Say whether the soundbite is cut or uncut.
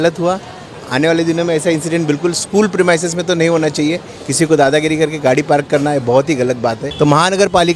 cut